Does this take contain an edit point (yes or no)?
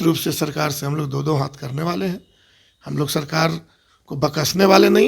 no